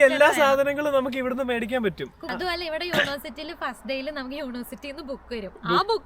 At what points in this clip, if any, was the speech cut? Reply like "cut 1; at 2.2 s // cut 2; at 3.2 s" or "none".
cut 1; at 2.2 s

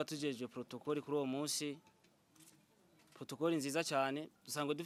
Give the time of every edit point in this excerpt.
none

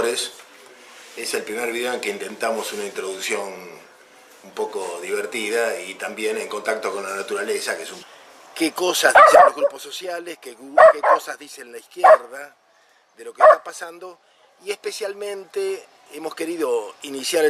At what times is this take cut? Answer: none

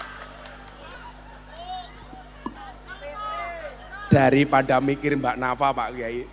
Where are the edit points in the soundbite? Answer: cut 1; at 0.9 s

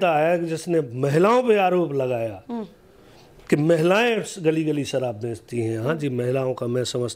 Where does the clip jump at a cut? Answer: none

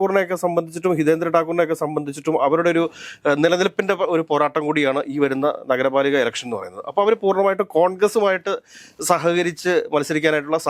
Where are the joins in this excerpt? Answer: none

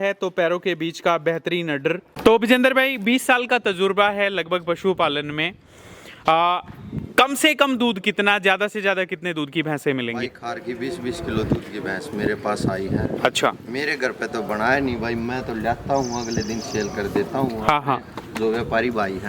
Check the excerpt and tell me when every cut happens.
cut 1; at 2.1 s

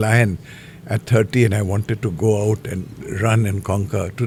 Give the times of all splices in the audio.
none

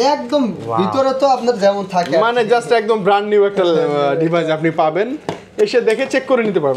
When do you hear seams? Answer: none

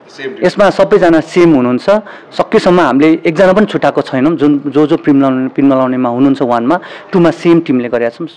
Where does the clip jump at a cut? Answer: none

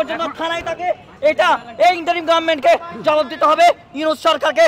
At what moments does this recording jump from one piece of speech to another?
none

